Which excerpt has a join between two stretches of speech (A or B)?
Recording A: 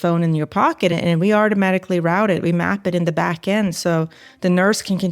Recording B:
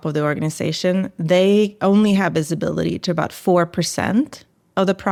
A